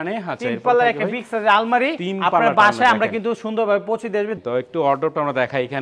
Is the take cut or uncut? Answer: cut